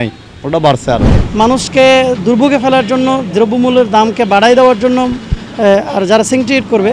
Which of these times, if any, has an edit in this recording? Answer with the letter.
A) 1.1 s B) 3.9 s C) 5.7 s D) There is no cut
A